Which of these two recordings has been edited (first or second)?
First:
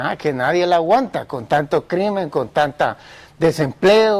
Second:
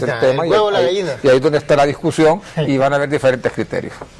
first